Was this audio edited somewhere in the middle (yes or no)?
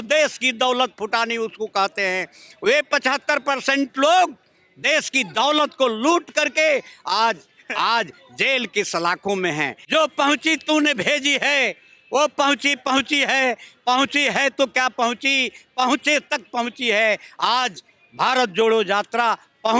yes